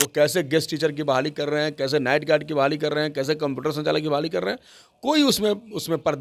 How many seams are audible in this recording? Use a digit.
0